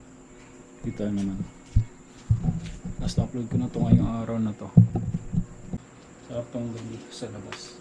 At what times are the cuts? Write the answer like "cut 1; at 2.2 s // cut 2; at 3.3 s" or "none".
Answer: cut 1; at 6.0 s